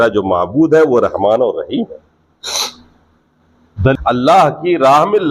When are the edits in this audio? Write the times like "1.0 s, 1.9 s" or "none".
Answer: 3.9 s

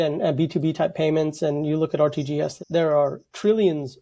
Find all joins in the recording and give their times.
2.6 s

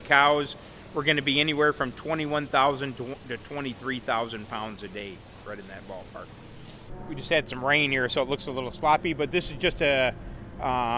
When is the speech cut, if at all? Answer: none

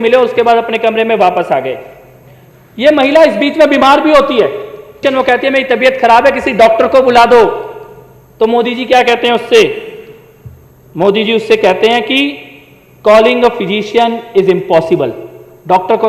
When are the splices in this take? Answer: 4.9 s

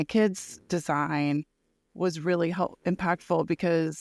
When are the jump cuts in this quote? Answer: none

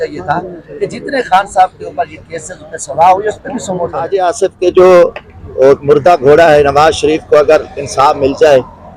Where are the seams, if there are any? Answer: 4.1 s

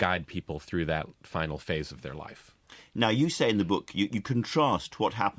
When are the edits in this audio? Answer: none

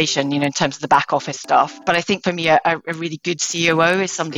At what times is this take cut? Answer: 1.8 s

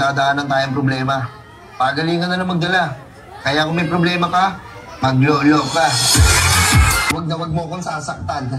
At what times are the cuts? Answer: 7.1 s

